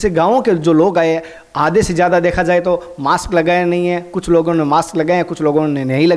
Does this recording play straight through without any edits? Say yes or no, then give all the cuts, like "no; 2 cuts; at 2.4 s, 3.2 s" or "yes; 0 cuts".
yes; 0 cuts